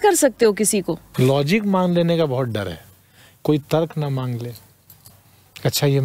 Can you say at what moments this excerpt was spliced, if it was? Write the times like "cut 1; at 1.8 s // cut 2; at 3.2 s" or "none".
cut 1; at 1.1 s